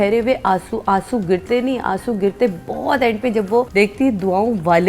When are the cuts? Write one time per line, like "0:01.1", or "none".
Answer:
0:03.7